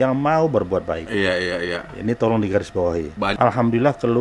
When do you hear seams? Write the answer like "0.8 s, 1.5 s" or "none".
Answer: 3.3 s